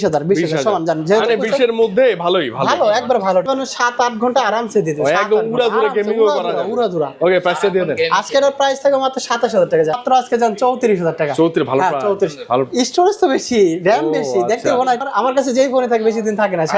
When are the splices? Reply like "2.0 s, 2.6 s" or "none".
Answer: 3.4 s, 10.0 s, 15.0 s